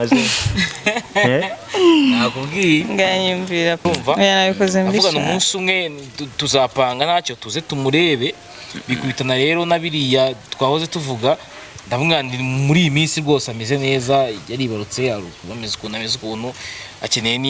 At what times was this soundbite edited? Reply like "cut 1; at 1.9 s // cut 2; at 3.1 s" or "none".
cut 1; at 3.9 s